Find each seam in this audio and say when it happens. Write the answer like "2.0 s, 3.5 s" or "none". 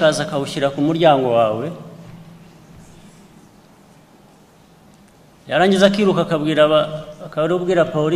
none